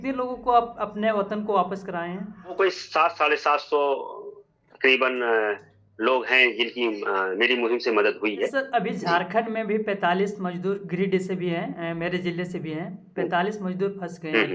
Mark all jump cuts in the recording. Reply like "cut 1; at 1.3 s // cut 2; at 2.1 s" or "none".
cut 1; at 2.5 s // cut 2; at 8.5 s